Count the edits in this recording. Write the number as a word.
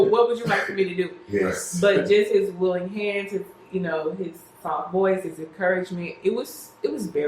zero